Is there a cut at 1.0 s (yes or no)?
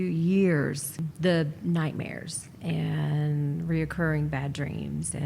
yes